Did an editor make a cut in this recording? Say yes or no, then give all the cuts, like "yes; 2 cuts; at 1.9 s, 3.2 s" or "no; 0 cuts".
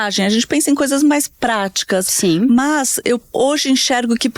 no; 0 cuts